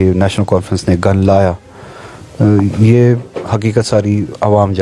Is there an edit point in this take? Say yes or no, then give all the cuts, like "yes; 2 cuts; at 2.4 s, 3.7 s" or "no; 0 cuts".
no; 0 cuts